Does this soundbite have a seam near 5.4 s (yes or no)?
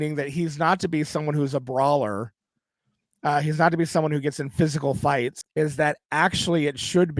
yes